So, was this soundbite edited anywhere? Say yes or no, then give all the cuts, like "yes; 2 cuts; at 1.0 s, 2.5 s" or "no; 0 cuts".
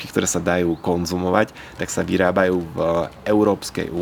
no; 0 cuts